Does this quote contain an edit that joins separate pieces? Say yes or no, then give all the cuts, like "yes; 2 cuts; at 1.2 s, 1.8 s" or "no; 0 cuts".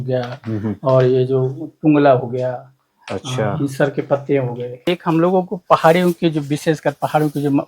yes; 1 cut; at 4.9 s